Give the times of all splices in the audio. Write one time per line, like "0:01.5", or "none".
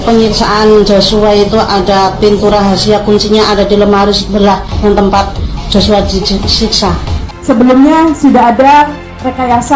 0:07.3